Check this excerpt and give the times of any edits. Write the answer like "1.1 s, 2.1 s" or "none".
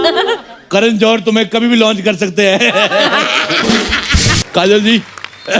4.4 s